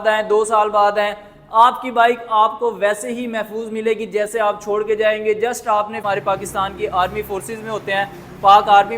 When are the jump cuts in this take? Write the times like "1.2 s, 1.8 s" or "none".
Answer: 6.0 s